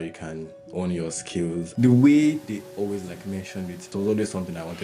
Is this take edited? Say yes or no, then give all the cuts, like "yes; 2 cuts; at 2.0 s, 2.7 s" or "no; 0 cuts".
yes; 2 cuts; at 1.7 s, 3.9 s